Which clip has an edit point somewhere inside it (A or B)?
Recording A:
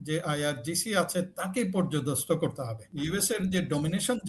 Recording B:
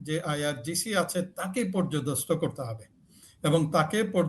A